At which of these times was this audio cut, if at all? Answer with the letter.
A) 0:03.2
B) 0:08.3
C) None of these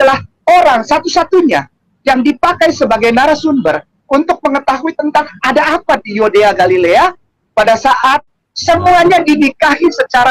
B